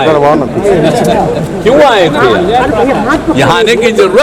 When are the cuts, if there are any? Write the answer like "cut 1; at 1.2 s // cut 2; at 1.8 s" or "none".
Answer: none

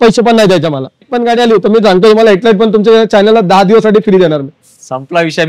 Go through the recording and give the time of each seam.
cut 1; at 1.1 s

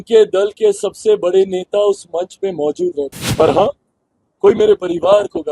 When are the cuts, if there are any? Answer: cut 1; at 3.2 s

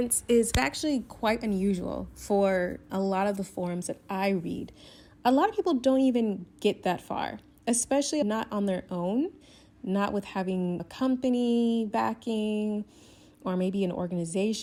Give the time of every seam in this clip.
none

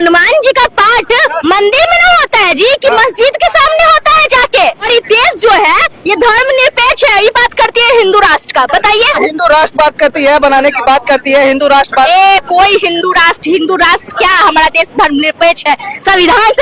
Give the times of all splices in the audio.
cut 1; at 4.8 s // cut 2; at 9.2 s

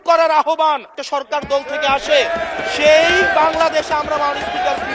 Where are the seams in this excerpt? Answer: cut 1; at 1.0 s

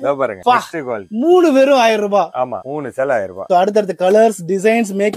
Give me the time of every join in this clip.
cut 1; at 3.4 s

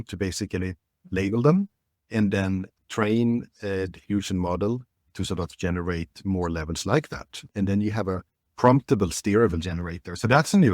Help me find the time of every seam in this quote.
cut 1; at 2.8 s // cut 2; at 7.5 s

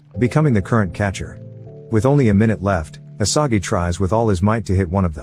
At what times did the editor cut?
none

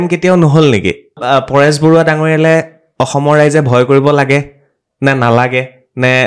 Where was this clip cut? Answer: cut 1; at 1.2 s

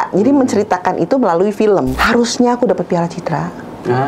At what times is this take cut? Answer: cut 1; at 1.9 s

